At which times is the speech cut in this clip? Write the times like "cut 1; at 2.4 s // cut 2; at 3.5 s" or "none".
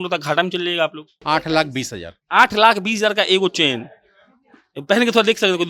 cut 1; at 1.1 s